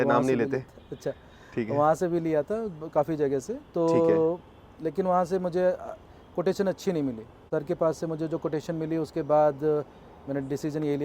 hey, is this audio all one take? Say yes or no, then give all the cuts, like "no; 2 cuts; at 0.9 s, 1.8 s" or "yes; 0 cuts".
no; 1 cut; at 7.4 s